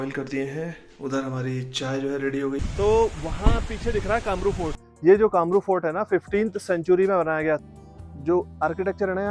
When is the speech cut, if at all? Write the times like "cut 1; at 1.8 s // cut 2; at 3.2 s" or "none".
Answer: cut 1; at 2.6 s // cut 2; at 4.8 s // cut 3; at 7.6 s